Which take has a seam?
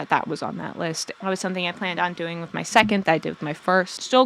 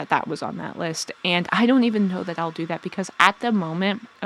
first; 1 cut; at 1.1 s

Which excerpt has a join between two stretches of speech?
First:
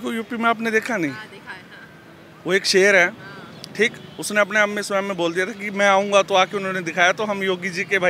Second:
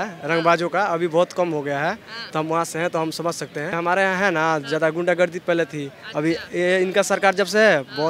second; 1 cut; at 3.7 s

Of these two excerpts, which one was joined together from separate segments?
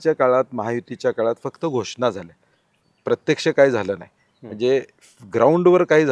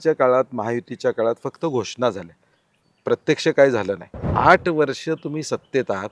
second; 1 cut; at 4.3 s

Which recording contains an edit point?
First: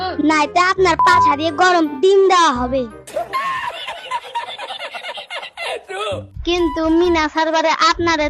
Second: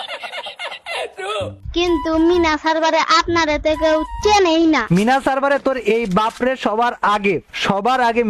first; 1 cut; at 3.0 s

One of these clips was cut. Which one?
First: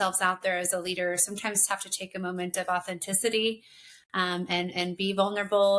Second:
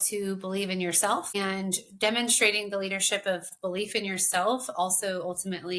second; 2 cuts; at 1.3 s, 3.5 s

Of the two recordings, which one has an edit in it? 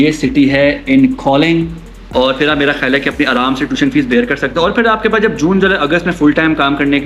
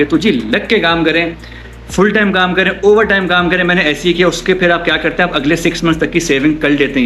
first; 1 cut; at 2.0 s

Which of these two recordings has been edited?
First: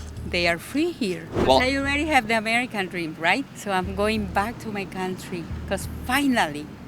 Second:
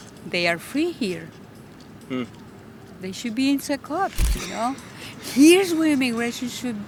first; 3 cuts; at 1.3 s, 3.5 s, 5.6 s

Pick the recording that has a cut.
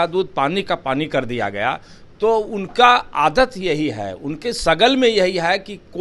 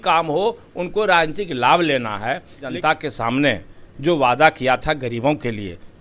second; 1 cut; at 2.7 s

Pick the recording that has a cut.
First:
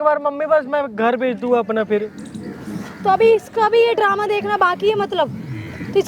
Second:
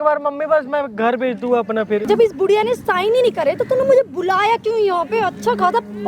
second; 1 cut; at 2.0 s

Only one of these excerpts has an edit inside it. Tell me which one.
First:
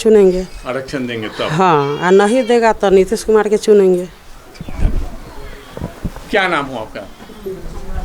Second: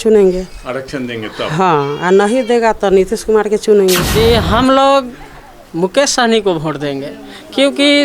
second; 1 cut; at 4.1 s

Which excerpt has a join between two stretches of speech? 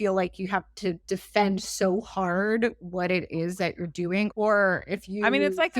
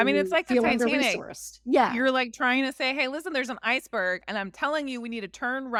first; 2 cuts; at 1.0 s, 4.3 s

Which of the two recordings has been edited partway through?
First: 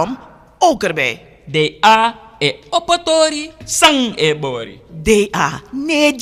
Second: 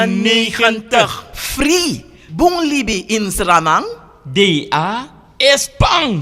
second; 1 cut; at 1.3 s

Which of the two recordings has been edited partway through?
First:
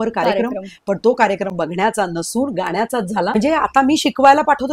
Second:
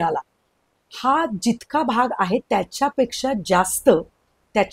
first; 1 cut; at 3.3 s

